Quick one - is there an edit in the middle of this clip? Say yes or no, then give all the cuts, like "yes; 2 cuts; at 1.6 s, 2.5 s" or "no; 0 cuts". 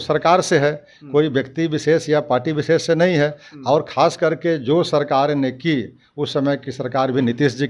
no; 0 cuts